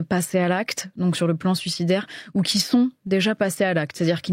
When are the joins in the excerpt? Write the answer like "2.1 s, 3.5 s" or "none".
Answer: none